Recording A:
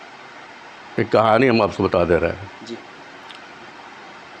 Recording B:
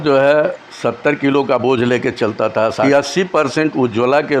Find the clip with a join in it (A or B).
B